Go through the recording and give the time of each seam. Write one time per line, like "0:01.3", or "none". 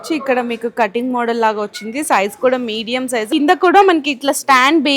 0:03.3

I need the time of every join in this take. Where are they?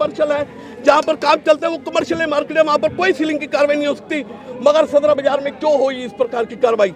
none

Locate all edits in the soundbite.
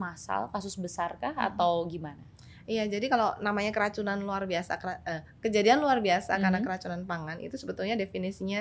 none

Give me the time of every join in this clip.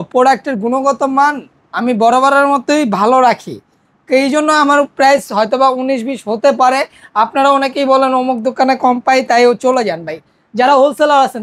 none

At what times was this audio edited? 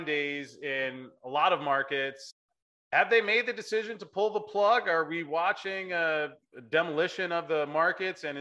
0:02.2
0:06.4

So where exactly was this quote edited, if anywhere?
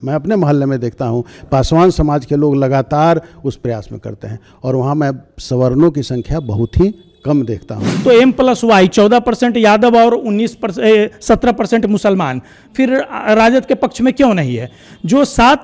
0:08.0

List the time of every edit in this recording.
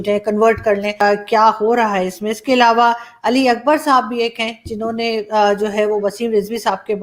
0:01.0

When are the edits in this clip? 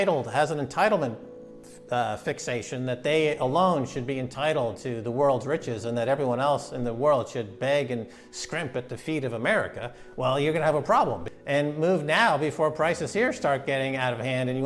0:11.3

